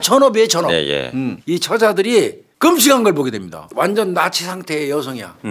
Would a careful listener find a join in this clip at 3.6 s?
yes; 3 cuts; at 1.4 s, 2.4 s, 3.6 s

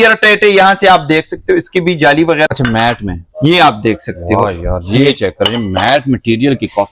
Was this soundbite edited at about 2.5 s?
yes; 1 cut; at 2.5 s

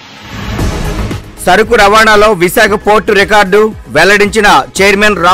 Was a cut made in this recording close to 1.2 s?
yes; 1 cut; at 1.2 s

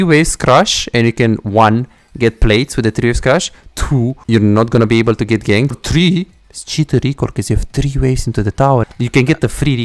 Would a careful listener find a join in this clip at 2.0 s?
no; 3 cuts; at 4.2 s, 5.8 s, 8.9 s

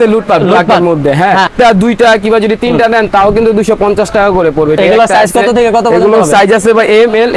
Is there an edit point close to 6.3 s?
no; 2 cuts; at 1.5 s, 4.8 s

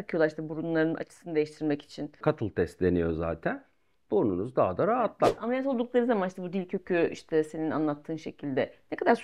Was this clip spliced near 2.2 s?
yes; 2 cuts; at 2.2 s, 5.3 s

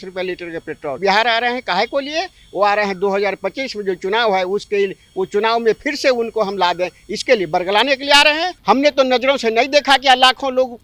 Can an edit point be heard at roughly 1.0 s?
yes; 2 cuts; at 1.0 s, 8.5 s

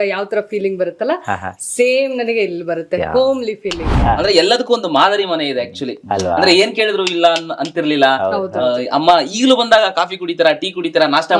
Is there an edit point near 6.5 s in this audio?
no; 1 cut; at 3.9 s

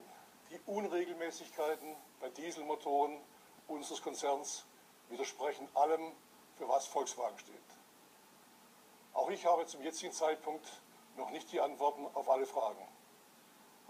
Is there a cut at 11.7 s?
no; 0 cuts

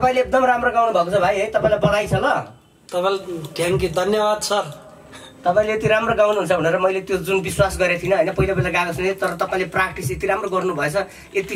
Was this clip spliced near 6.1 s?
no; 0 cuts

